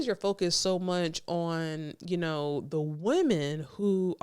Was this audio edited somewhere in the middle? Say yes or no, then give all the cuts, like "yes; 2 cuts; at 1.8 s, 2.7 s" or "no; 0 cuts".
no; 0 cuts